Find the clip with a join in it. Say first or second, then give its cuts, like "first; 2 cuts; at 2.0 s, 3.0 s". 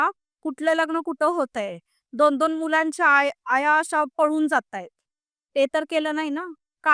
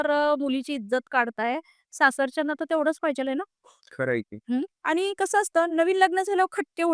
second; 1 cut; at 4.7 s